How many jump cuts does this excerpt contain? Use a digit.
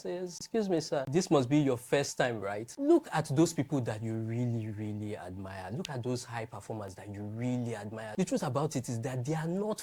2